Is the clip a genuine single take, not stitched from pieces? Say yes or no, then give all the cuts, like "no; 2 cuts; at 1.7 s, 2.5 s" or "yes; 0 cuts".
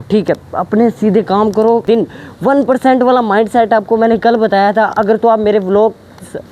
no; 1 cut; at 1.8 s